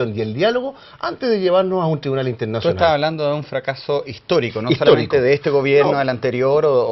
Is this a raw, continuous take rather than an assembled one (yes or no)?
no